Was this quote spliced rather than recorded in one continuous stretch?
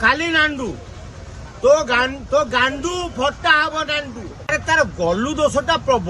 yes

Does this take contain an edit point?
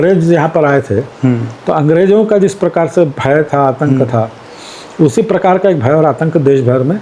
no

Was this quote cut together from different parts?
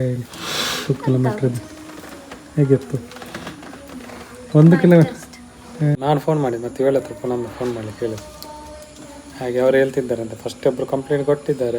yes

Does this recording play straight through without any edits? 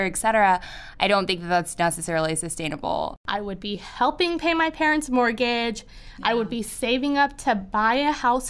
no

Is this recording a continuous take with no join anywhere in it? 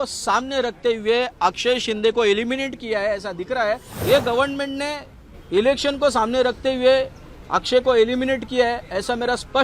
no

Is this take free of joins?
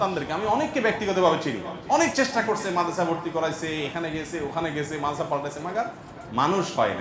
yes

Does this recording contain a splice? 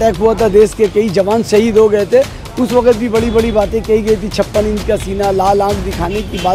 no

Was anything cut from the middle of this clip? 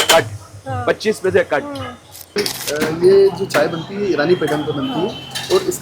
yes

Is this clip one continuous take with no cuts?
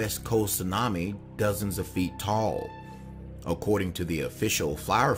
yes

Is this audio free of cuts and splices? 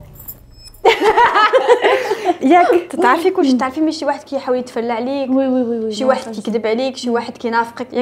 yes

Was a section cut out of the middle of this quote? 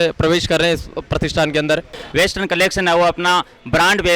yes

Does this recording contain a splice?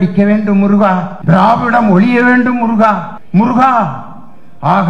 yes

